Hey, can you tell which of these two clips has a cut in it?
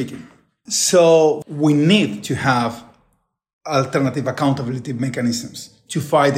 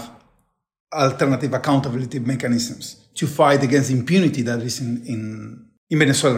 first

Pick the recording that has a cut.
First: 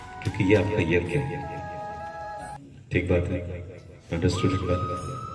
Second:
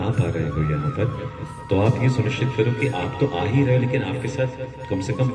first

